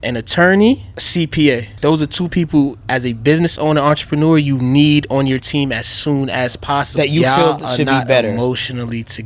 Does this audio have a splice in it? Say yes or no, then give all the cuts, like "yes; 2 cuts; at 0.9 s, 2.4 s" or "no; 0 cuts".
yes; 3 cuts; at 1.0 s, 1.7 s, 6.9 s